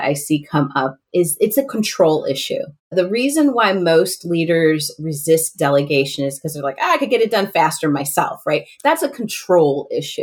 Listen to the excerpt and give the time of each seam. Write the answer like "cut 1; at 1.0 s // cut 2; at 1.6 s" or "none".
cut 1; at 2.9 s